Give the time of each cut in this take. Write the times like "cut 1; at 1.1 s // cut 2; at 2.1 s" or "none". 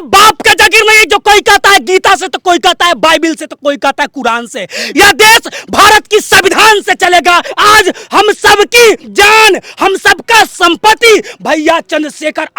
cut 1; at 7.5 s // cut 2; at 9.1 s

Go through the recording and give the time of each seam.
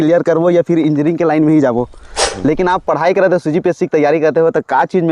cut 1; at 2.2 s

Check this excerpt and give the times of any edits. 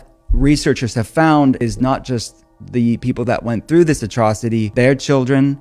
cut 1; at 1.6 s // cut 2; at 4.7 s

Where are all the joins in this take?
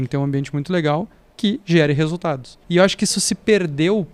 cut 1; at 1.2 s // cut 2; at 2.5 s

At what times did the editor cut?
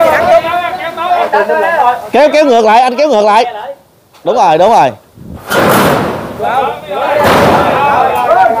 none

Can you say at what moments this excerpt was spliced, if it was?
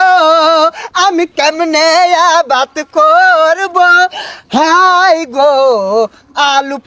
none

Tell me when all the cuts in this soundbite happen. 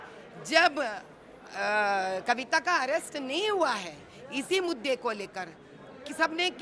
none

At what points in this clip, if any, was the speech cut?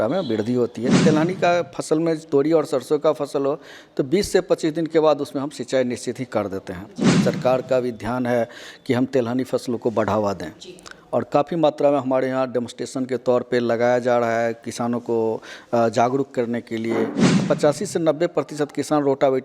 cut 1; at 1.0 s // cut 2; at 7.2 s // cut 3; at 17.3 s

